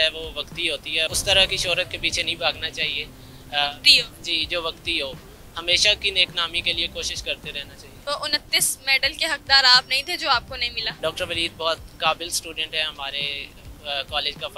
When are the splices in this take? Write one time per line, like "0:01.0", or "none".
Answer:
0:01.1
0:08.0
0:11.0